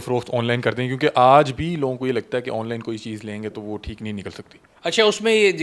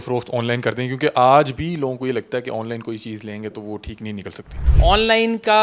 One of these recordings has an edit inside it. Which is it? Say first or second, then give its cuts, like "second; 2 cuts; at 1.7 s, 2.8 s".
second; 1 cut; at 4.6 s